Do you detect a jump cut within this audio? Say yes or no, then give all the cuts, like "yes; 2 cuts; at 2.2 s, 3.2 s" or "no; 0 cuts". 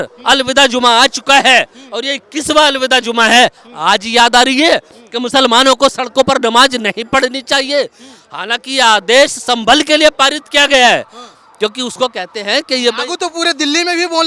no; 0 cuts